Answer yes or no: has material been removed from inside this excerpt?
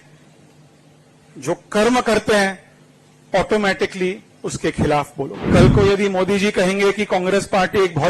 yes